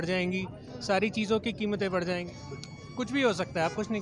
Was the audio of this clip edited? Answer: yes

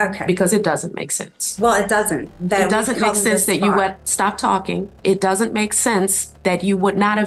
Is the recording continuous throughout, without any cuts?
yes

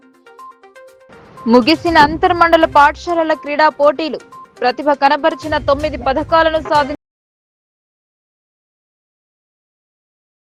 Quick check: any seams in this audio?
no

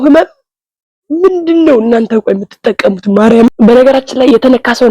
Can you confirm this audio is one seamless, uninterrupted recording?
no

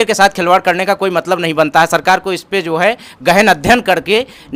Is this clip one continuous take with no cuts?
yes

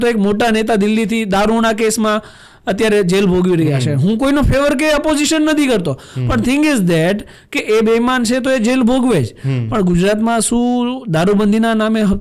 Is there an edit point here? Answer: no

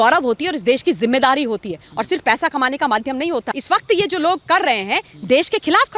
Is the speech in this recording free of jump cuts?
no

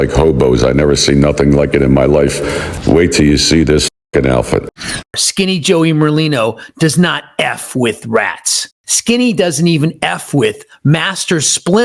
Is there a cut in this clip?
yes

